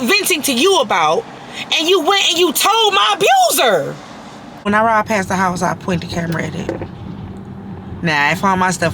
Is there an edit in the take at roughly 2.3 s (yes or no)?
no